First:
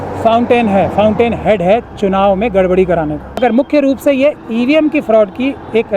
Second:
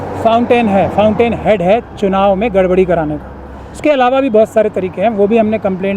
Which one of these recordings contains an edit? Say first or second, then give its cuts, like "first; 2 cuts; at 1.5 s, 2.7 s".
first; 1 cut; at 3.4 s